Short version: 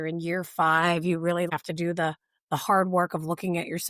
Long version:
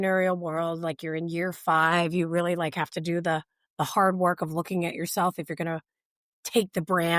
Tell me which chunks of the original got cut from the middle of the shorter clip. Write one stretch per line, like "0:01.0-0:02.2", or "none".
0:02.6-0:02.8